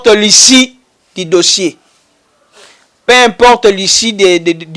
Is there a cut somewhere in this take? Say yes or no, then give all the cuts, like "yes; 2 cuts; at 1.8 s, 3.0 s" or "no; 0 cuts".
no; 0 cuts